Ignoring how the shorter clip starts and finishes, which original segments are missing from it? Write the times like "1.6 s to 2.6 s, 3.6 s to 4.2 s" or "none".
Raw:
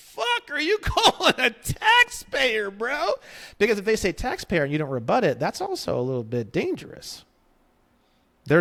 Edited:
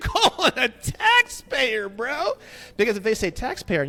none